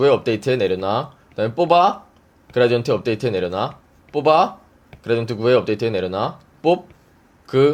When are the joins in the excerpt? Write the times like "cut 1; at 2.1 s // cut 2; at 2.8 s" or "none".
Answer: none

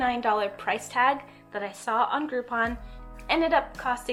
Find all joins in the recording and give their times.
none

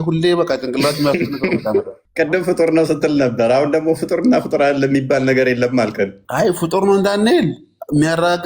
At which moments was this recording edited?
cut 1; at 2.0 s // cut 2; at 6.2 s

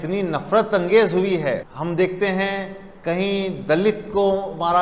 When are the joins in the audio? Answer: cut 1; at 1.7 s

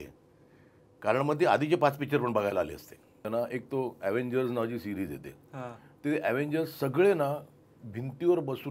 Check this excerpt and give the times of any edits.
cut 1; at 3.2 s

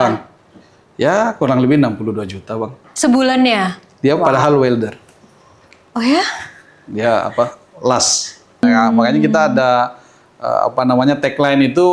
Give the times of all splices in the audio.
cut 1; at 8.6 s

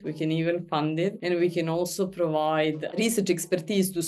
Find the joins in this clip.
cut 1; at 1.2 s // cut 2; at 2.9 s

